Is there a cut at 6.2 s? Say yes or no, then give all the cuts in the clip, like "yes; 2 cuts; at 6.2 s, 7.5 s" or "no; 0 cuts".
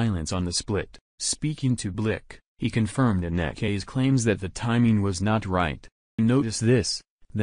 yes; 1 cut; at 6.2 s